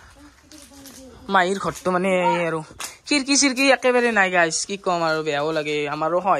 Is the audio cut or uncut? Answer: uncut